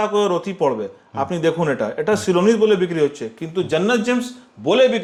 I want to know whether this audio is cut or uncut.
uncut